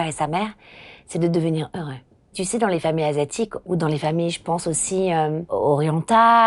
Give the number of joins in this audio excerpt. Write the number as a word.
three